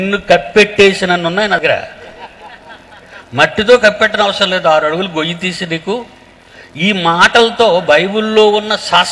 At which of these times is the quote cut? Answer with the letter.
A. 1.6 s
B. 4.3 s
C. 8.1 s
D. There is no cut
A